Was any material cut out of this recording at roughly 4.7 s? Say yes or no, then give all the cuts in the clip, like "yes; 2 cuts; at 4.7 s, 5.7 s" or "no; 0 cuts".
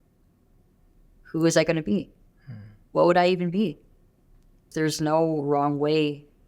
yes; 1 cut; at 4.7 s